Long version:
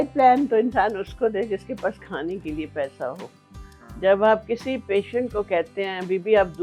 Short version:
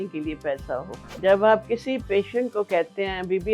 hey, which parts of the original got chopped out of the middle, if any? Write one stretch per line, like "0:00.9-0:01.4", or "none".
0:03.3-0:03.8